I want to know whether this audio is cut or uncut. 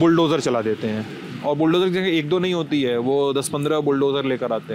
uncut